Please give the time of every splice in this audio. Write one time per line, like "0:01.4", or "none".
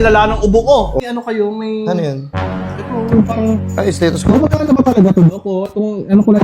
0:01.0